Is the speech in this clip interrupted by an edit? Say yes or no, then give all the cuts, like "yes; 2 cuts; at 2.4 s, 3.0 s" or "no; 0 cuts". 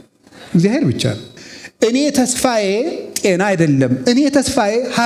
yes; 1 cut; at 1.3 s